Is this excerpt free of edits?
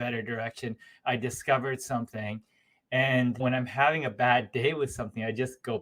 yes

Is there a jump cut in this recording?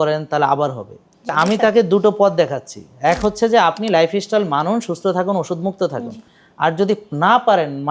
yes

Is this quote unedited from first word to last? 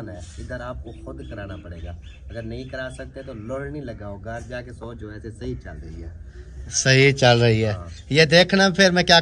yes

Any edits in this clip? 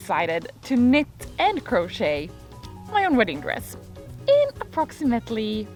no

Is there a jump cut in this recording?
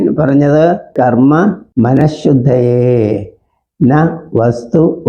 yes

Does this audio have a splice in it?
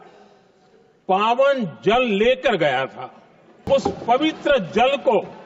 yes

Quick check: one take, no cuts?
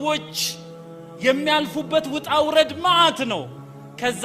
yes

